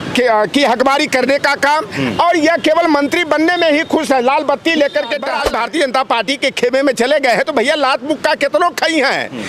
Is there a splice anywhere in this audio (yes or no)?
yes